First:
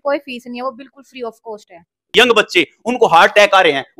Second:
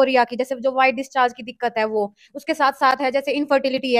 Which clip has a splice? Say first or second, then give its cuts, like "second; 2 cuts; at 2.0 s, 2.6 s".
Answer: first; 1 cut; at 2.1 s